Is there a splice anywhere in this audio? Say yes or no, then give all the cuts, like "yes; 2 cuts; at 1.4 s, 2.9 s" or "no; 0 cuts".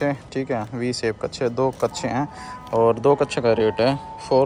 no; 0 cuts